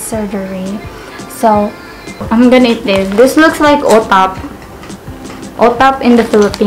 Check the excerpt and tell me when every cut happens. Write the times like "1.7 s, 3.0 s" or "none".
2.2 s